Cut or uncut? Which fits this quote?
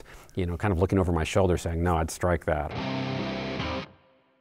cut